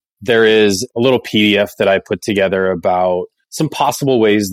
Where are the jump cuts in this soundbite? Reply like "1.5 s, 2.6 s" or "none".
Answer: none